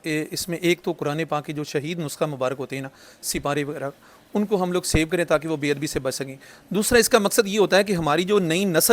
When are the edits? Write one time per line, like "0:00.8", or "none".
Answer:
none